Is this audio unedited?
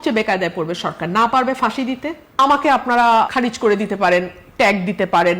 no; 2 cuts; at 2.2 s, 3.3 s

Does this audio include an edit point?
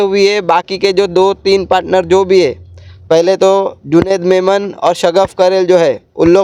no; 0 cuts

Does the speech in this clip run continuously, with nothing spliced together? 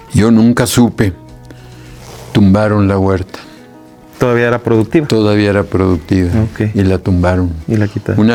yes; 0 cuts

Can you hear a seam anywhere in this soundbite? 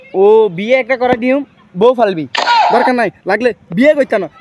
yes; 1 cut; at 2.3 s

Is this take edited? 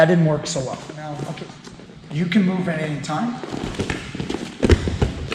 yes; 1 cut; at 1.1 s

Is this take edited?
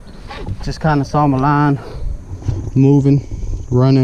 no; 0 cuts

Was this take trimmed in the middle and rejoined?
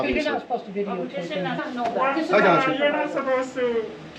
yes; 1 cut; at 1.7 s

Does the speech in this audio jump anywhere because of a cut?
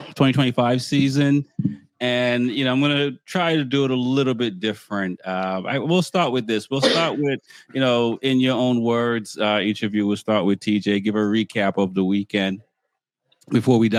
no; 0 cuts

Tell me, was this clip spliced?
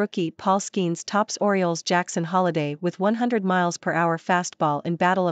no; 0 cuts

